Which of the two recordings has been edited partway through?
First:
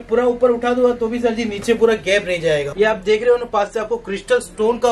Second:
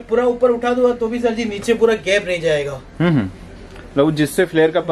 first; 1 cut; at 2.7 s

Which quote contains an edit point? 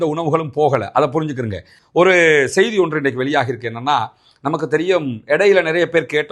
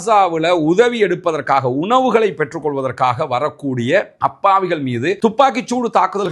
first; 1 cut; at 1.7 s

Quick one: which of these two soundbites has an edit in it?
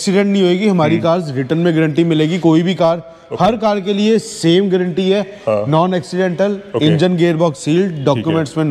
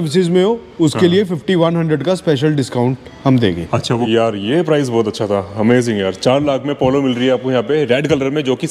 second; 1 cut; at 4.0 s

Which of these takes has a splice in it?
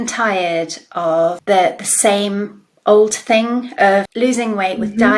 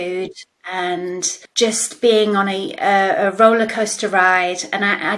first; 1 cut; at 1.4 s

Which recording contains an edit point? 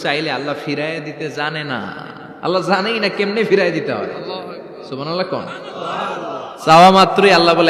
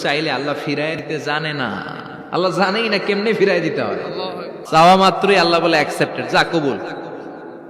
second; 2 cuts; at 1.0 s, 4.5 s

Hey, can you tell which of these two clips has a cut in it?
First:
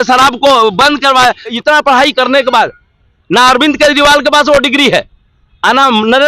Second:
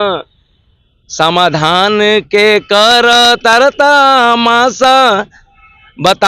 first; 1 cut; at 1.6 s

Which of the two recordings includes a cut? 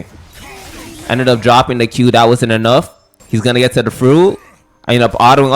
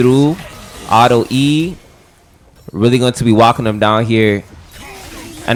first; 1 cut; at 3.2 s

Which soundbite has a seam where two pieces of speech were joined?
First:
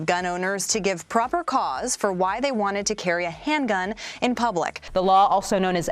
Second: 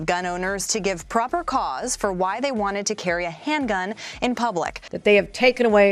first; 1 cut; at 4.8 s

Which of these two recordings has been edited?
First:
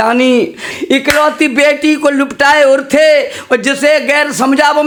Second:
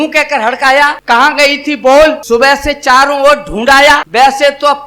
second; 3 cuts; at 1.0 s, 2.2 s, 4.1 s

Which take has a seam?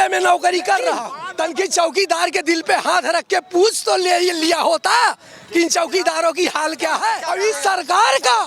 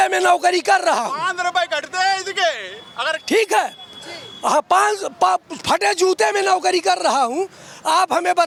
first; 2 cuts; at 1.2 s, 7.2 s

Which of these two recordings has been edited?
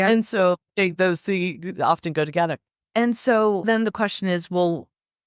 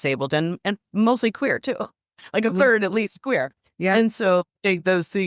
first; 1 cut; at 3.7 s

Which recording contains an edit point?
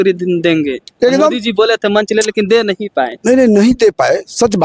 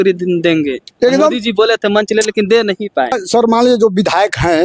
second; 1 cut; at 3.1 s

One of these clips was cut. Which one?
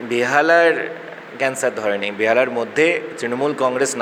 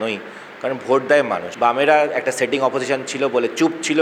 second; 1 cut; at 1.5 s

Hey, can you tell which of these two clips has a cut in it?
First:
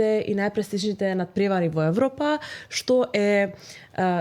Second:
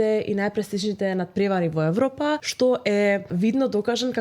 second; 2 cuts; at 2.5 s, 3.3 s

